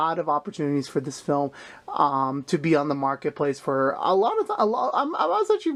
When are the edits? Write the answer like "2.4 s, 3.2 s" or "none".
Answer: none